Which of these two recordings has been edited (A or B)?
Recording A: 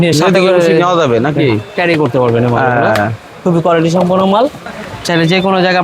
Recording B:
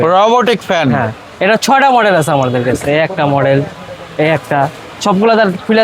A